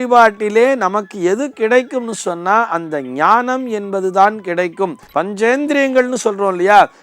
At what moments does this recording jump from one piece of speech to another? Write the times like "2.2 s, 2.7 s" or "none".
5.0 s